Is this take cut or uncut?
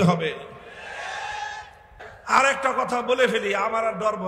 cut